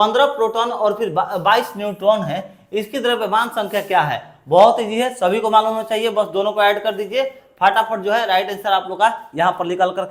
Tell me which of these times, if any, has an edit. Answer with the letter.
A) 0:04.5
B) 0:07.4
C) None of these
C